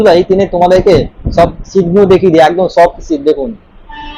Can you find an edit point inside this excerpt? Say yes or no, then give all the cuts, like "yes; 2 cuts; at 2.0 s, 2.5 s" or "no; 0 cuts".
no; 0 cuts